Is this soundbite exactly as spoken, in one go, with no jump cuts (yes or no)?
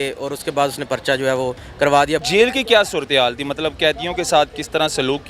no